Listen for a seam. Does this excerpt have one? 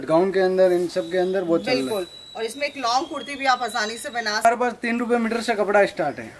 yes; 1 cut; at 4.5 s

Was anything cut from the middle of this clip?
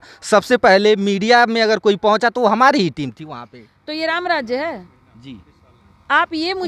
no; 0 cuts

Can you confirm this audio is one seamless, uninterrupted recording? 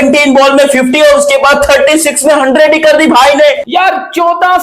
no; 1 cut; at 3.6 s

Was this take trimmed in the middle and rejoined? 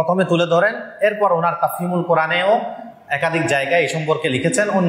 no; 0 cuts

